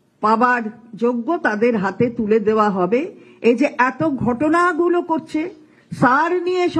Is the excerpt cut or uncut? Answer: uncut